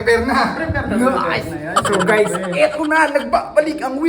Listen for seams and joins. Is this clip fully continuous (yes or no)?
yes